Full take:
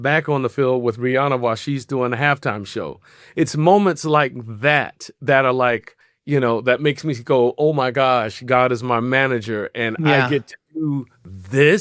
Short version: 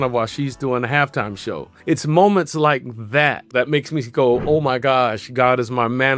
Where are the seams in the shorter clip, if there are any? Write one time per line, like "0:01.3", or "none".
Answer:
0:01.7
0:03.5